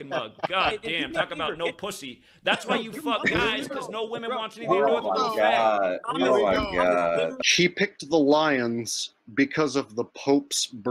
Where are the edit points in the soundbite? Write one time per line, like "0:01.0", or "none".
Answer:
0:02.2
0:06.0
0:07.4

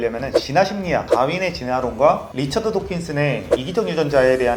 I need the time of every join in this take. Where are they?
none

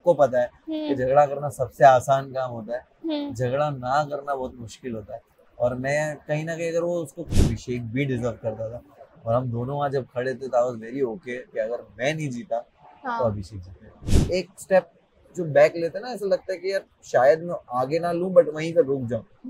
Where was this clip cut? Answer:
0:07.5
0:14.1

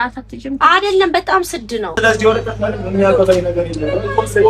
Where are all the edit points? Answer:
0:01.9

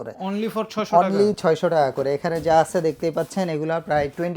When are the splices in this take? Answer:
none

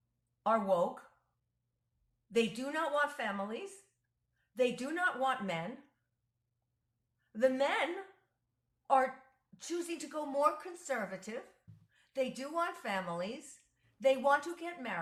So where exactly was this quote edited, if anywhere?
none

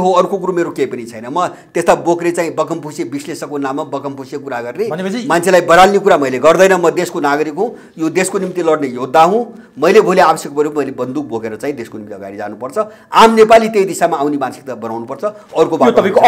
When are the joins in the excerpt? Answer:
none

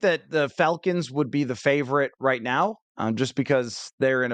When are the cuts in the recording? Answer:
none

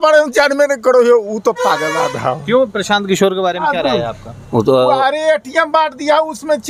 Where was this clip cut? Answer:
none

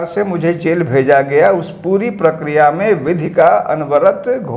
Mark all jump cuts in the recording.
none

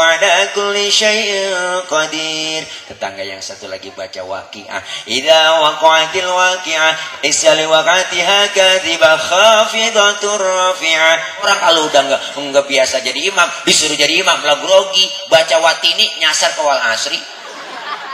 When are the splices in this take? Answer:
0:11.5

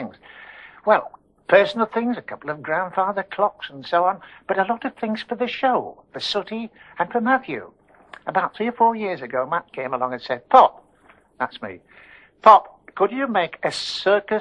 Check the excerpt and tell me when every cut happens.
0:10.9

